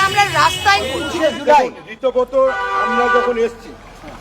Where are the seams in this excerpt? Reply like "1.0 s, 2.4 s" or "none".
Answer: 1.0 s